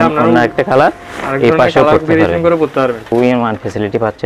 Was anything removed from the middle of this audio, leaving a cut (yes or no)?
yes